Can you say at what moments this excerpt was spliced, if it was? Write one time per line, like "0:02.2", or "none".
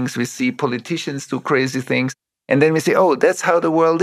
0:02.3